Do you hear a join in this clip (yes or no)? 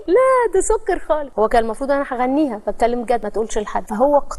yes